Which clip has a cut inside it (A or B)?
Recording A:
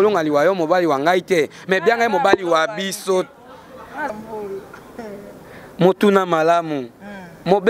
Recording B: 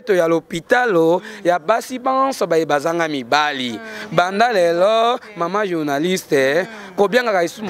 A